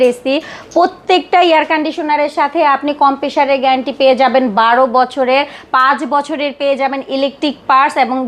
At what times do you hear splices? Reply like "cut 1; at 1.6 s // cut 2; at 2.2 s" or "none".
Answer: none